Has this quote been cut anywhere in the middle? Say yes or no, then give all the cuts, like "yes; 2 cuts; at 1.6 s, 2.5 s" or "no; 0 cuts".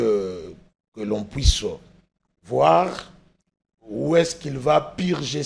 no; 0 cuts